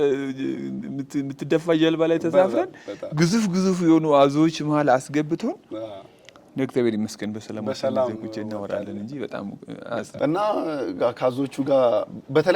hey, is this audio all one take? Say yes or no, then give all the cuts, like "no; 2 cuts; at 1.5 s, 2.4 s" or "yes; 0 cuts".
yes; 0 cuts